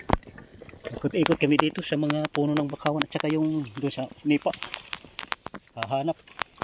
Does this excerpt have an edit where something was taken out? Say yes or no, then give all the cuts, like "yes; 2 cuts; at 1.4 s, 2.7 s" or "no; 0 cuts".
no; 0 cuts